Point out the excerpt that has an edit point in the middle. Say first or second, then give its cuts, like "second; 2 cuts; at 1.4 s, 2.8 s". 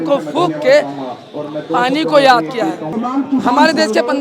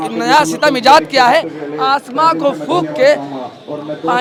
first; 1 cut; at 2.9 s